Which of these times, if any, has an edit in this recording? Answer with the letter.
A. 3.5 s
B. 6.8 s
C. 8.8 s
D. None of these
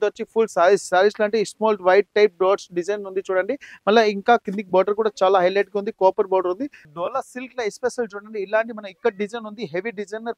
B